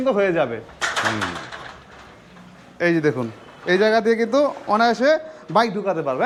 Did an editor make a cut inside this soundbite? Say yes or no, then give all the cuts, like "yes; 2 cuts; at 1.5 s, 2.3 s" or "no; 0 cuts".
no; 0 cuts